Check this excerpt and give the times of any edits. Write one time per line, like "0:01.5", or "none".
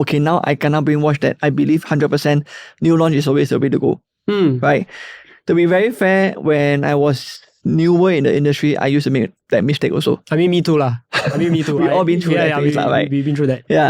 none